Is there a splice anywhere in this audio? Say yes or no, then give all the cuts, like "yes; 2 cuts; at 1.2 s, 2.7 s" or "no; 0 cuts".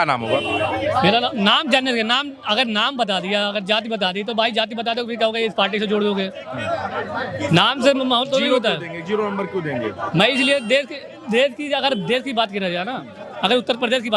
no; 0 cuts